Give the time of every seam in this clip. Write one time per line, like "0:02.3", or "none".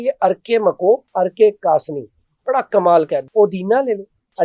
0:01.1
0:03.3